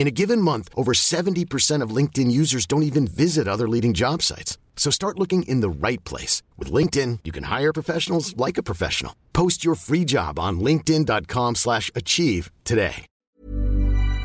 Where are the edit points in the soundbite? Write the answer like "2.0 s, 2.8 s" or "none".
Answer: 13.1 s

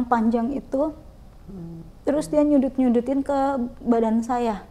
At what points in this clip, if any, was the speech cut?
none

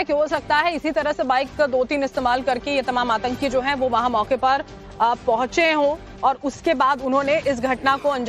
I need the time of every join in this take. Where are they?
5.5 s

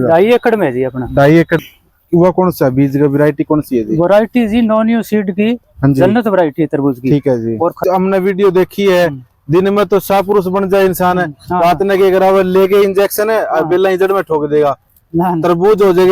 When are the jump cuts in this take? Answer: 1.6 s, 7.8 s

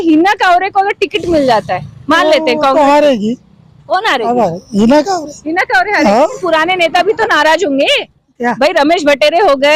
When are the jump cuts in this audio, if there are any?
6.4 s

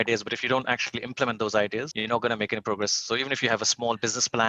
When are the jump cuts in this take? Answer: 1.9 s

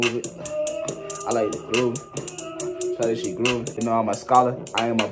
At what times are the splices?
3.8 s

